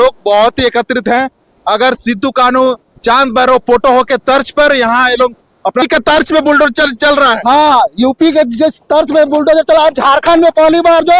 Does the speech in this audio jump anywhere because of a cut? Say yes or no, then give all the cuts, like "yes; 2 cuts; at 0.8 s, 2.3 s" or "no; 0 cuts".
yes; 1 cut; at 5.8 s